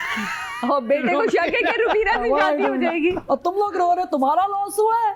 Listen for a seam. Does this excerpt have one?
no; 0 cuts

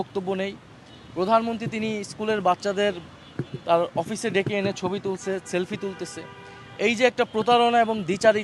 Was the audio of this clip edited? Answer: no; 0 cuts

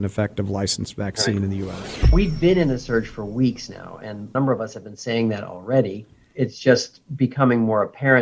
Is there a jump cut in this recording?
yes; 1 cut; at 2.1 s

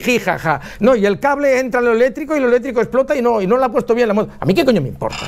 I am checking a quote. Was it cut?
no; 0 cuts

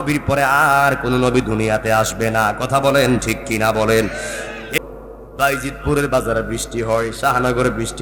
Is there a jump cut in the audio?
yes; 1 cut; at 4.8 s

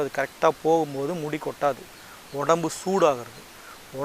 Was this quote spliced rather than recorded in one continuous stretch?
yes; 1 cut; at 1.8 s

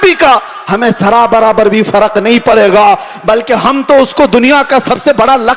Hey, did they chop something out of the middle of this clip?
no; 0 cuts

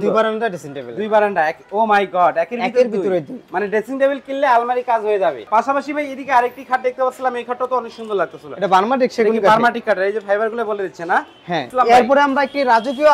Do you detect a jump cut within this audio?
yes; 2 cuts; at 5.4 s, 11.6 s

